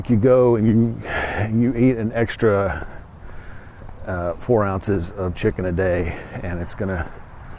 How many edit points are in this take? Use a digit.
0